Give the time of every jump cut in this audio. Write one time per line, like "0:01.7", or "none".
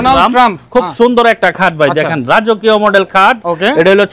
none